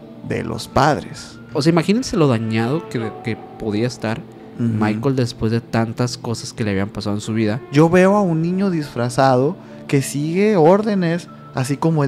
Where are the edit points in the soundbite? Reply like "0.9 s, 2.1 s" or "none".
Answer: 1.5 s, 7.6 s